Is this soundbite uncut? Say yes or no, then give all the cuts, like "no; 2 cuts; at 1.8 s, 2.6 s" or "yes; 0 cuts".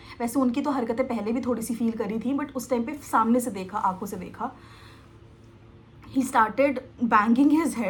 yes; 0 cuts